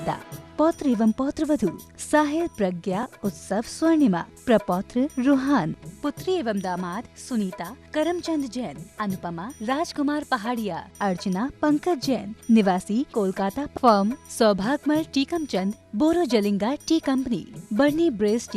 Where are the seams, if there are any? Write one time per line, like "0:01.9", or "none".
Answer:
none